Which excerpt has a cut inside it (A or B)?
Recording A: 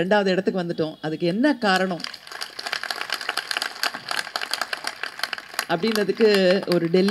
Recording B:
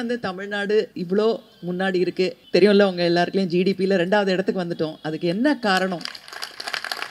B